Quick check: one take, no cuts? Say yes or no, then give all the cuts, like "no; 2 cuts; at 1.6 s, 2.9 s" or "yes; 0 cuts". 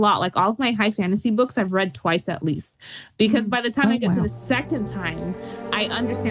yes; 0 cuts